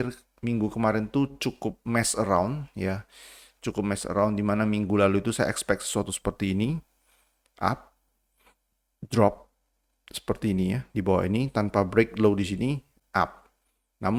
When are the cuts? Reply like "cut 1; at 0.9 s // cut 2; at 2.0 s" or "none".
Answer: none